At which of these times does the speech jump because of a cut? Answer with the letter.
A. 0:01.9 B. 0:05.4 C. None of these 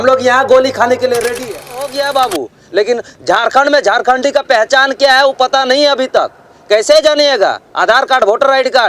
A